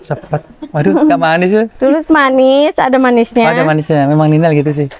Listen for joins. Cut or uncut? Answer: uncut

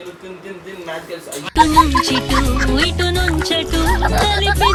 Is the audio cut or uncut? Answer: uncut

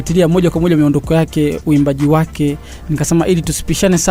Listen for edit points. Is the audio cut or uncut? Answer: uncut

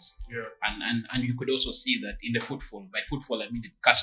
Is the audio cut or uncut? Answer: uncut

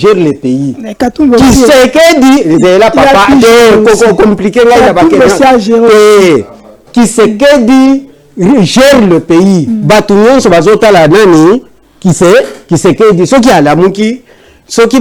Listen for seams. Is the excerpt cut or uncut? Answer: uncut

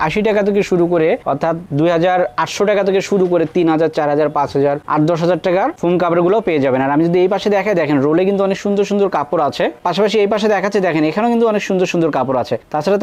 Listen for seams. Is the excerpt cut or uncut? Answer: uncut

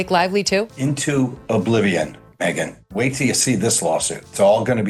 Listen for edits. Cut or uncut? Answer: uncut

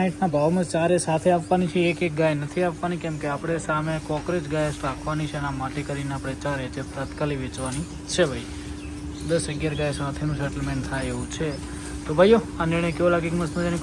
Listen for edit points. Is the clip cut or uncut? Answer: uncut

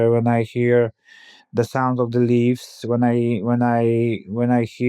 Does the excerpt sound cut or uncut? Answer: uncut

